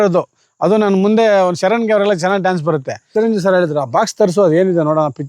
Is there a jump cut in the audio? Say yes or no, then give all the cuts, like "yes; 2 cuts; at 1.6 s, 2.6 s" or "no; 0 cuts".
yes; 1 cut; at 3.0 s